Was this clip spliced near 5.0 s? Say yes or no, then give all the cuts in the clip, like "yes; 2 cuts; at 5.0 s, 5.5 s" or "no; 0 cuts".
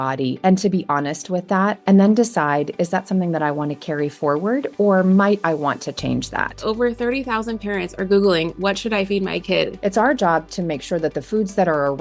no; 3 cuts; at 1.8 s, 6.6 s, 9.7 s